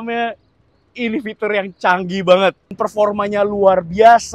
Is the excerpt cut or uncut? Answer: cut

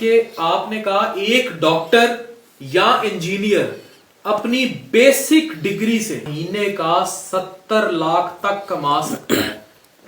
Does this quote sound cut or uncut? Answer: cut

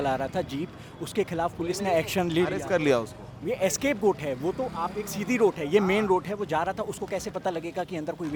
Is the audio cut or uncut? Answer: uncut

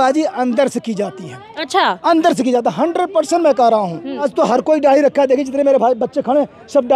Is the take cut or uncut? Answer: cut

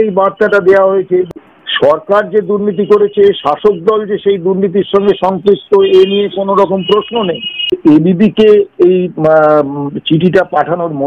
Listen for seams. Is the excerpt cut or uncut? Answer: cut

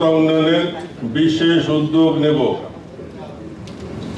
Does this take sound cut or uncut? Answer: uncut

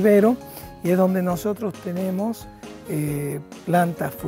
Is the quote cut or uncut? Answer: uncut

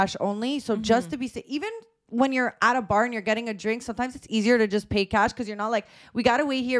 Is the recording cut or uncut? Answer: uncut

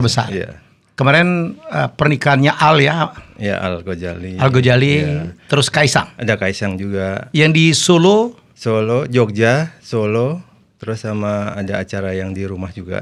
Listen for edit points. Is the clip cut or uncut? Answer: uncut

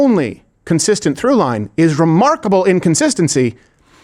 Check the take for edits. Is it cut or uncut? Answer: uncut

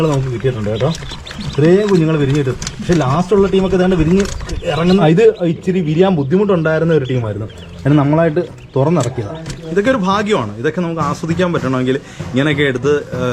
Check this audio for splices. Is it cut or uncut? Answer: cut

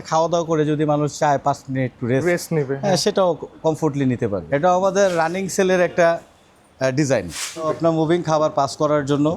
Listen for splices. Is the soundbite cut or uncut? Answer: cut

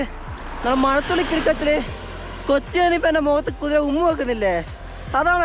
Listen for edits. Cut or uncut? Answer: uncut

